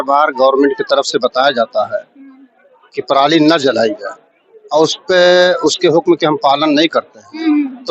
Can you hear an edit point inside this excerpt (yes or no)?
no